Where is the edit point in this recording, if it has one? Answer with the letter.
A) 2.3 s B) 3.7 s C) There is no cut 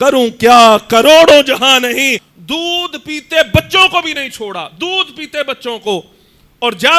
A